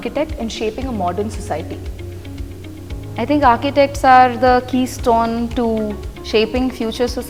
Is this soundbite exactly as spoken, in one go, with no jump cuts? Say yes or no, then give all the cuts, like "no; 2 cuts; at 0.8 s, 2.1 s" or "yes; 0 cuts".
yes; 0 cuts